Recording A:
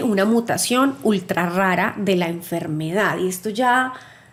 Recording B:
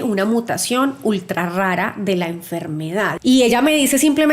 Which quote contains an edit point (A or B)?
B